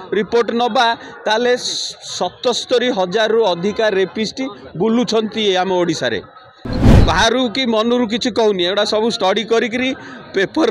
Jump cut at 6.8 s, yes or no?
yes